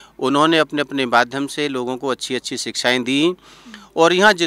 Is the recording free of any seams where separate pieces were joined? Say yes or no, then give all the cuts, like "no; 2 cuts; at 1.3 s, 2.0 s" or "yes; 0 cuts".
yes; 0 cuts